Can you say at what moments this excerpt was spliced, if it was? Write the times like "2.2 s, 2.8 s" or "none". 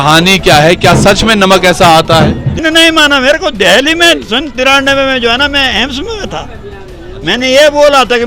2.6 s